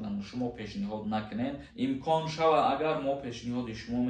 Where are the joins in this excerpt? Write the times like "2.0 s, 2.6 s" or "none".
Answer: 1.7 s